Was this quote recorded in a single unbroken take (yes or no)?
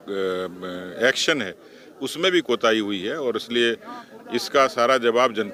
yes